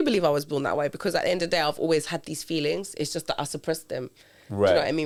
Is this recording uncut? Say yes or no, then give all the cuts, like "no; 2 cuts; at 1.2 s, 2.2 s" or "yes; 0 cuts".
yes; 0 cuts